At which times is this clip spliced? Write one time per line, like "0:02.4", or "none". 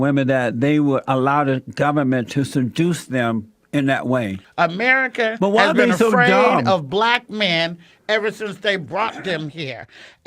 0:04.4